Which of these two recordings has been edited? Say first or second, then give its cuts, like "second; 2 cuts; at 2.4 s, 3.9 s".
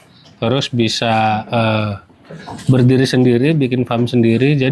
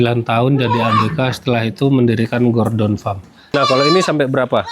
second; 1 cut; at 3.5 s